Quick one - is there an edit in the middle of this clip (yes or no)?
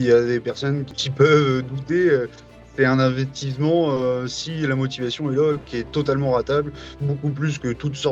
yes